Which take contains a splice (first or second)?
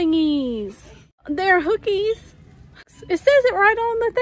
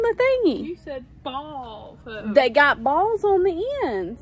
first